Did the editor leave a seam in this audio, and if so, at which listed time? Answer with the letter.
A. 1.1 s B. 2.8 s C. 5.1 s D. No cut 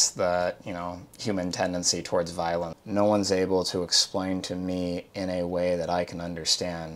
B